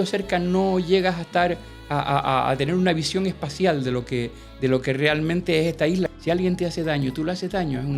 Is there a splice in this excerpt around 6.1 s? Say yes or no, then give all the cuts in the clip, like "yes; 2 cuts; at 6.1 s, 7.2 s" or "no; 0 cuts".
yes; 1 cut; at 6.1 s